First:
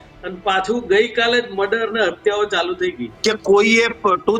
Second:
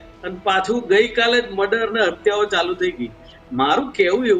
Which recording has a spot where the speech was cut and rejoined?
first; 1 cut; at 3.1 s

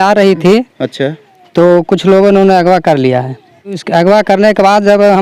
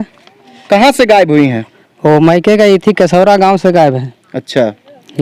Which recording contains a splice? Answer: first; 1 cut; at 3.8 s

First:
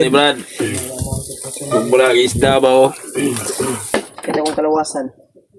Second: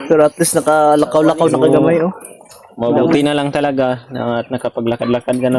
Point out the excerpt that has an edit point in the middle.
first; 1 cut; at 3.8 s

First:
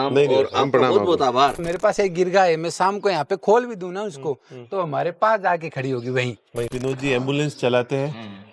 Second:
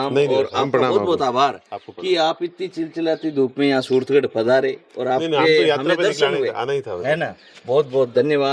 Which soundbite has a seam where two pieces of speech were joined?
first; 2 cuts; at 1.7 s, 6.7 s

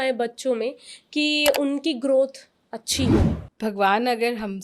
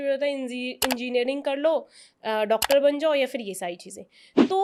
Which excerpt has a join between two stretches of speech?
first; 1 cut; at 3.4 s

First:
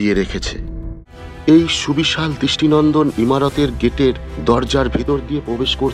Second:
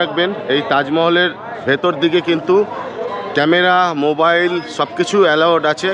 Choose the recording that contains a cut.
first; 1 cut; at 0.9 s

